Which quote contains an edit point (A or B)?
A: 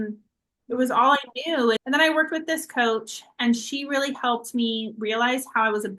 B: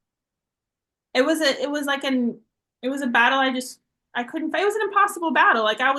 A